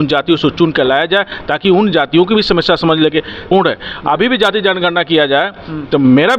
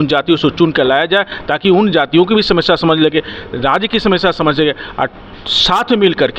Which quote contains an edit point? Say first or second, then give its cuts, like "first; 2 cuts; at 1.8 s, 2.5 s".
first; 1 cut; at 3.5 s